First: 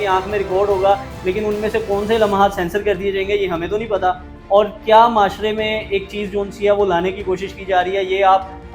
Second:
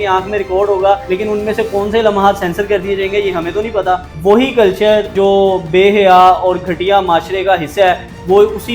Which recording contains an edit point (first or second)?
second